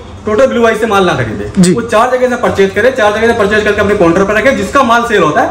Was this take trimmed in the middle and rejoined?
no; 0 cuts

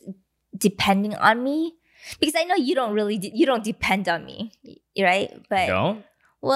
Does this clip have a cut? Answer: no; 0 cuts

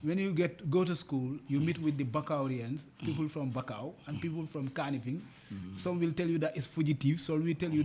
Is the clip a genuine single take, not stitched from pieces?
yes; 0 cuts

